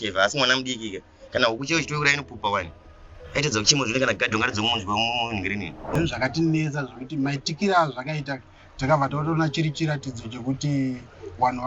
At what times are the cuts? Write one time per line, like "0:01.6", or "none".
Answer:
0:05.8